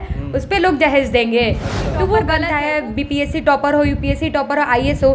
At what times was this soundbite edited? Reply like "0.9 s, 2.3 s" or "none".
2.5 s